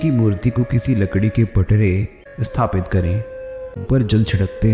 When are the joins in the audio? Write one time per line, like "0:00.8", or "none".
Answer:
0:02.2
0:03.8